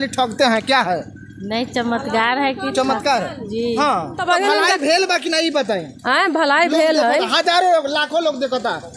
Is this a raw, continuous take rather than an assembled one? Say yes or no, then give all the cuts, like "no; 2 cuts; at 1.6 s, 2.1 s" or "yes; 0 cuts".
yes; 0 cuts